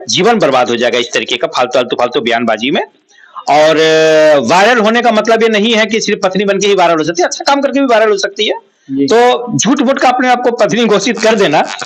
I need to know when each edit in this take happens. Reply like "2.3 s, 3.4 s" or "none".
none